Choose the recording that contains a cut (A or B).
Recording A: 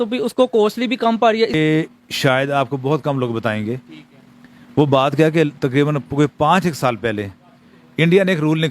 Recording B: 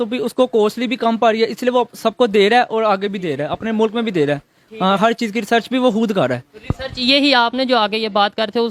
A